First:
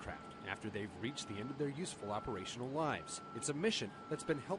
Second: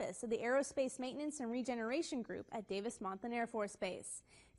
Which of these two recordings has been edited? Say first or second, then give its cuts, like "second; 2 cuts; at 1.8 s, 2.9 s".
second; 1 cut; at 1.7 s